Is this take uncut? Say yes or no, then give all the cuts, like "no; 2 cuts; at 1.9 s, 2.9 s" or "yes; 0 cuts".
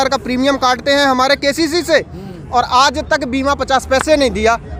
yes; 0 cuts